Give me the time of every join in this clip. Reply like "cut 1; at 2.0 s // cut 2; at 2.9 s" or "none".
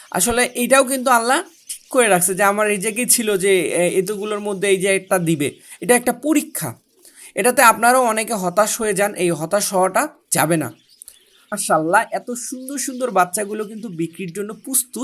cut 1; at 11.6 s